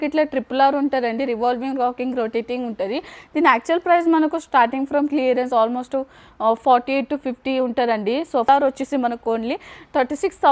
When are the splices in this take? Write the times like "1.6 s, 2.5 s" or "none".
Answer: 8.5 s